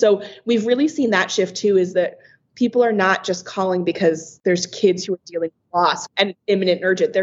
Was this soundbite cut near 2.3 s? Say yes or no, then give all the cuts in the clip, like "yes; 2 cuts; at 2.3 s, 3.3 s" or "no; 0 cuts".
no; 2 cuts; at 4.3 s, 6.1 s